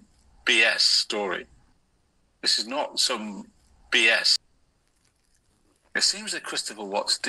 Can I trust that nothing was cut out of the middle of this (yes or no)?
no